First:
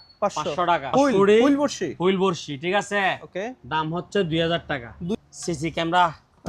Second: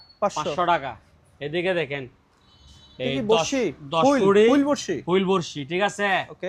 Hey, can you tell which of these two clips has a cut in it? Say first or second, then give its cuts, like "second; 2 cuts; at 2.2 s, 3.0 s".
first; 2 cuts; at 0.9 s, 5.1 s